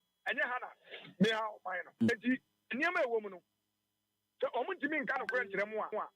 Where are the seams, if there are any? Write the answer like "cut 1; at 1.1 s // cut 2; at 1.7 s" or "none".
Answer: cut 1; at 2.1 s